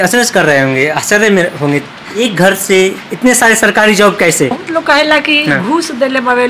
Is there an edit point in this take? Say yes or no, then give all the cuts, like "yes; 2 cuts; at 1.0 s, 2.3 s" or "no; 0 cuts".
yes; 2 cuts; at 2.2 s, 4.6 s